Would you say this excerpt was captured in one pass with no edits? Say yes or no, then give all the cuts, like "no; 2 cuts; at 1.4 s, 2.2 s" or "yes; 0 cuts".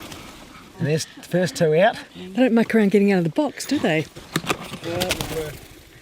no; 1 cut; at 4.2 s